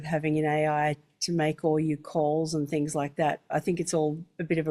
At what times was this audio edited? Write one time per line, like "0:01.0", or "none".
0:03.5

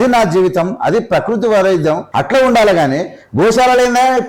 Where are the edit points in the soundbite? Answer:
0:02.1

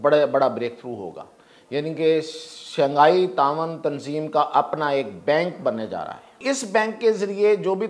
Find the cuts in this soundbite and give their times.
0:06.4

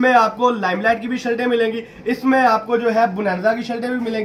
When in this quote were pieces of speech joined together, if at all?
none

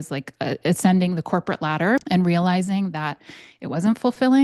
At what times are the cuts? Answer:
0:02.1

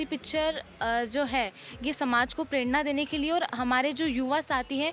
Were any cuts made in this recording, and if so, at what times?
none

